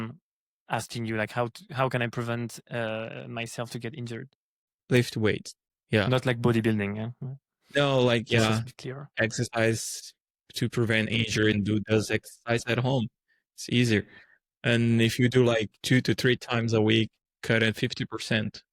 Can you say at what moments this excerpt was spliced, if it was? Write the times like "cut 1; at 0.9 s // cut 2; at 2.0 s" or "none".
none